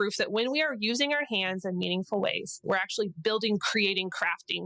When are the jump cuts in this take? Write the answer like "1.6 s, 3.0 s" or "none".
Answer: 2.6 s